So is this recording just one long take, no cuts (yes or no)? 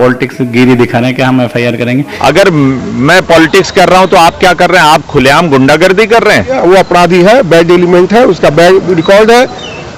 no